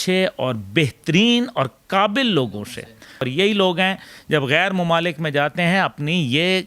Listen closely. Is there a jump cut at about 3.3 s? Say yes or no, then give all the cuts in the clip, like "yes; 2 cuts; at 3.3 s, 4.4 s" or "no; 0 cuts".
yes; 1 cut; at 3.3 s